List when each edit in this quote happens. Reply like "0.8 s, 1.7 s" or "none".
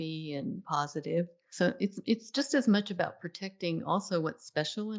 1.4 s